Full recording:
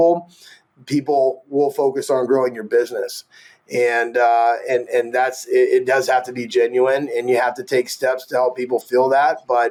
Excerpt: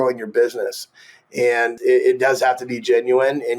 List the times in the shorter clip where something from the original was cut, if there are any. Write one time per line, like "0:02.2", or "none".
0:01.7

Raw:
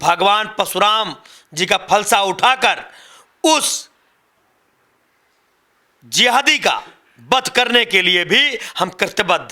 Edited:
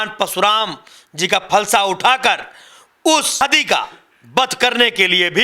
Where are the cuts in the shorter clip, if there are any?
0:03.4

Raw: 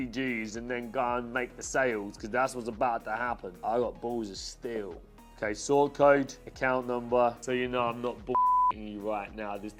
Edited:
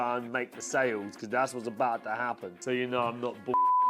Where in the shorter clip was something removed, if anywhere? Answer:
0:02.6

